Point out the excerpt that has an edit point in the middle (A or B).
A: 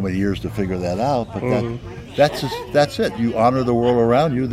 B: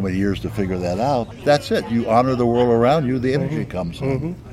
B